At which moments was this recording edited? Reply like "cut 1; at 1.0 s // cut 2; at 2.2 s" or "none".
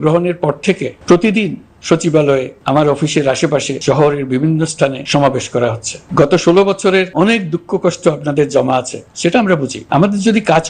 cut 1; at 0.9 s // cut 2; at 2.5 s // cut 3; at 3.7 s // cut 4; at 5.0 s // cut 5; at 5.9 s // cut 6; at 7.1 s // cut 7; at 9.8 s